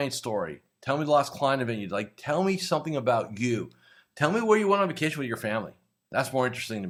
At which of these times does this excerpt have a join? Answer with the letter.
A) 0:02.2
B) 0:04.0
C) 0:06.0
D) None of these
D